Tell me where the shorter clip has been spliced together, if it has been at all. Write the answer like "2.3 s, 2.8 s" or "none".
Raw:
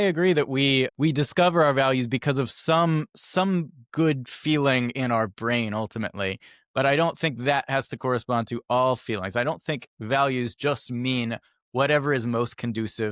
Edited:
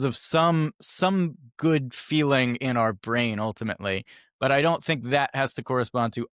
none